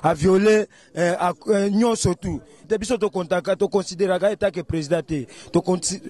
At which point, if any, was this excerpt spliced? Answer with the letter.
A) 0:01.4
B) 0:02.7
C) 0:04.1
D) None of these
B